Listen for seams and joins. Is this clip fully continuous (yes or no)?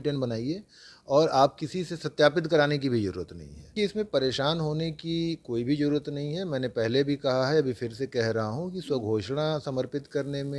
no